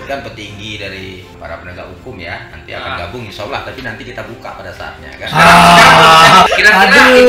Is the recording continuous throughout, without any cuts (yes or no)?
no